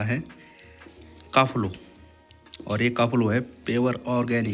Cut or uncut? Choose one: uncut